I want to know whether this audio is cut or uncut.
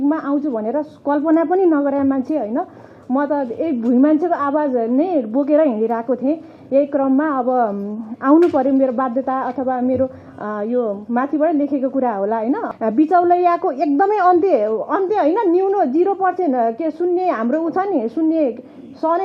cut